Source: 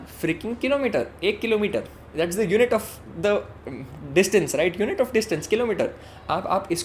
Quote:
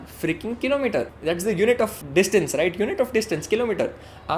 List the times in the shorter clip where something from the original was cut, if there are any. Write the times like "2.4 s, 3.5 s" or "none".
1.1 s, 2.0 s